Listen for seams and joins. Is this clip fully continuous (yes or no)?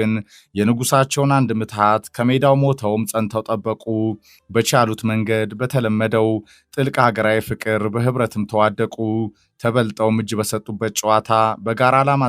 yes